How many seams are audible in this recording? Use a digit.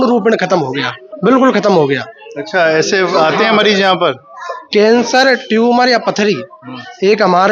0